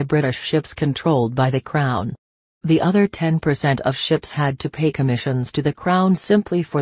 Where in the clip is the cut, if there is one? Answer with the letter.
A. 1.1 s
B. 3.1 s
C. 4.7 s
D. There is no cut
C